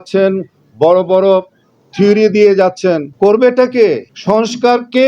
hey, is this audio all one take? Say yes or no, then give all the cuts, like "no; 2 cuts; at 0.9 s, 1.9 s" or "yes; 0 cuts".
no; 2 cuts; at 3.1 s, 4.1 s